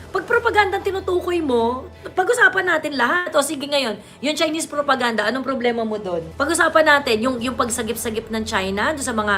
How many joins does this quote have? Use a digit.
1